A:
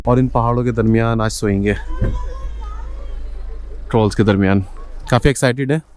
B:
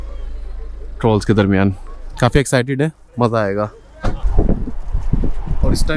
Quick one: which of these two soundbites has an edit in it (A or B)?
B